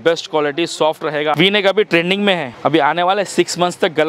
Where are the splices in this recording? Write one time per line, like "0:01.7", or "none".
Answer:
0:01.3
0:02.5